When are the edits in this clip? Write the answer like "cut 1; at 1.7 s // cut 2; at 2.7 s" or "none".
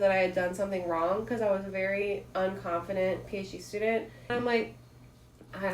cut 1; at 4.3 s

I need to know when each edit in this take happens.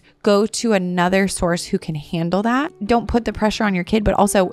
cut 1; at 2.7 s

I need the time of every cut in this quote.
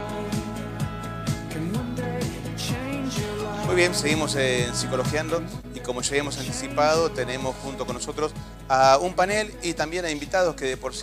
cut 1; at 2.3 s

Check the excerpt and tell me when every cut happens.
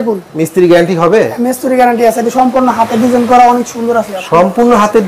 none

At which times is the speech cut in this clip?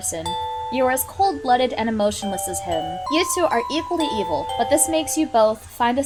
none

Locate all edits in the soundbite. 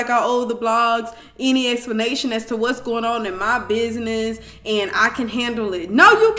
none

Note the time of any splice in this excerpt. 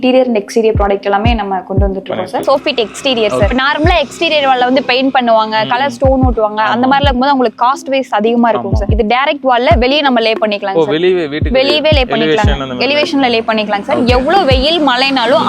cut 1; at 2.4 s // cut 2; at 3.5 s // cut 3; at 8.8 s

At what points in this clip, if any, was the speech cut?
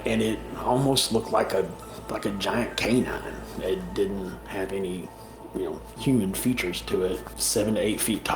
cut 1; at 7.3 s

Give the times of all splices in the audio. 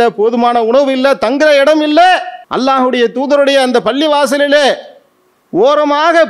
cut 1; at 2.4 s

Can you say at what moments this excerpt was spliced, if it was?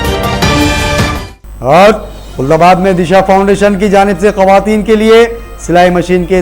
cut 1; at 1.3 s

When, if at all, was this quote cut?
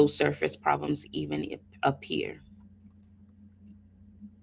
none

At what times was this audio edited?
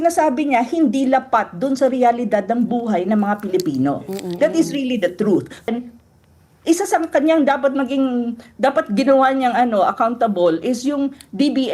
cut 1; at 5.7 s

